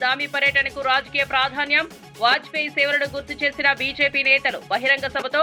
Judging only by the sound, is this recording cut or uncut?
uncut